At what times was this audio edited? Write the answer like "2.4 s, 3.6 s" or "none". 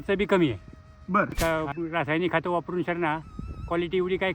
1.3 s